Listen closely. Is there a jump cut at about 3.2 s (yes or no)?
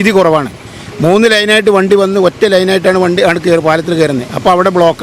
no